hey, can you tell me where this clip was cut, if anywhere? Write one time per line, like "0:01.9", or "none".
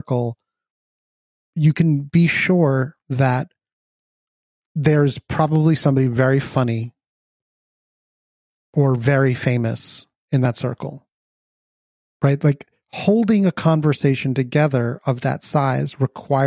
0:01.4